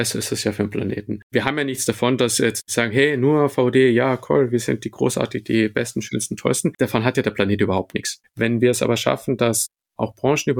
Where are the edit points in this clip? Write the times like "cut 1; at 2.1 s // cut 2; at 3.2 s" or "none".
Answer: cut 1; at 1.2 s // cut 2; at 6.7 s